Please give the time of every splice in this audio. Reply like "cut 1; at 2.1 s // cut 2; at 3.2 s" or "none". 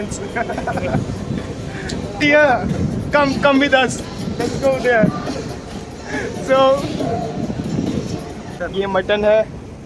cut 1; at 2.2 s // cut 2; at 8.5 s